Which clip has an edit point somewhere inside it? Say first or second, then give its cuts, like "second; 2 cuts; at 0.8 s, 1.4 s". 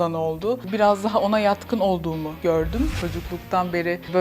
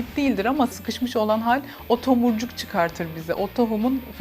first; 1 cut; at 2.9 s